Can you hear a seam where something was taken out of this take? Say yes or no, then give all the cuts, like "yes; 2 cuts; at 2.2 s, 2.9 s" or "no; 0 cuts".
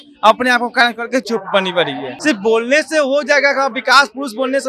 yes; 1 cut; at 2.1 s